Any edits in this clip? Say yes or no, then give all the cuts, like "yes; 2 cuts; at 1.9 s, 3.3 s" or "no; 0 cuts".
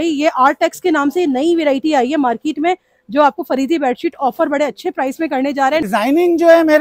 yes; 1 cut; at 5.9 s